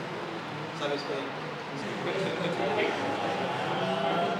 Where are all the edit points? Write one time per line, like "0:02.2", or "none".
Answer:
0:01.8